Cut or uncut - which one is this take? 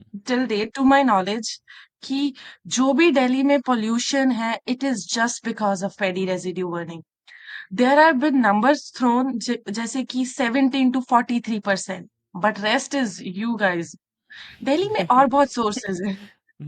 uncut